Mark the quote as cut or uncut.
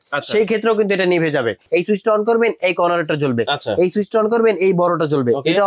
cut